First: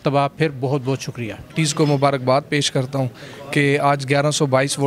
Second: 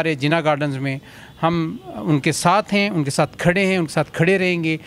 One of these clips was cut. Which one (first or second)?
first